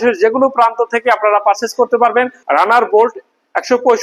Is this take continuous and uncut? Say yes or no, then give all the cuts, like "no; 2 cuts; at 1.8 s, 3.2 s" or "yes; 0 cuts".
no; 1 cut; at 2.4 s